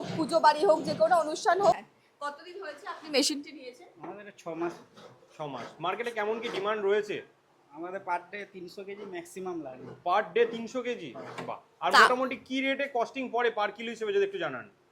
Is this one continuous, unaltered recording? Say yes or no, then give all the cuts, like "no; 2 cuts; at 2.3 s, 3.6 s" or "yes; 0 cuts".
no; 1 cut; at 1.8 s